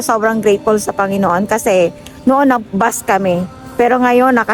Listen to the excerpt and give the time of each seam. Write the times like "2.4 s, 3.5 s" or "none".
none